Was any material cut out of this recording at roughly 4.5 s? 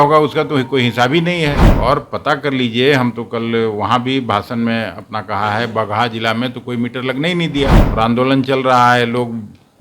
no; 2 cuts; at 1.7 s, 7.8 s

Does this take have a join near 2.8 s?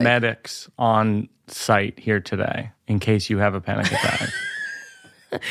no; 0 cuts

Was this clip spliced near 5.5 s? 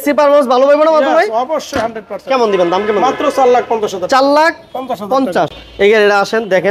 yes; 1 cut; at 5.5 s

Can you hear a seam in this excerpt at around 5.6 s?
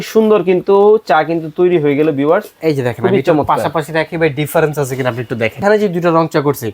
yes; 1 cut; at 5.6 s

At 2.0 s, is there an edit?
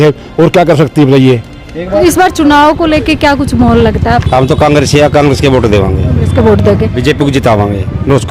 yes; 1 cut; at 2.0 s

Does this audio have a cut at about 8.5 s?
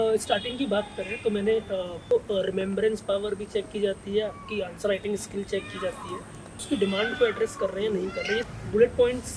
yes; 3 cuts; at 2.1 s, 6.6 s, 8.5 s

